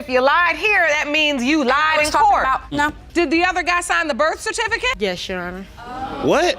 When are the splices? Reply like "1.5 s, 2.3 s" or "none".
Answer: 3.0 s